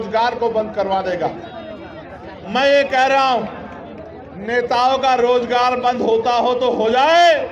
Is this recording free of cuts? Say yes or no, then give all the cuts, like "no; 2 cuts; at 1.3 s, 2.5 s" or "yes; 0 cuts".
yes; 0 cuts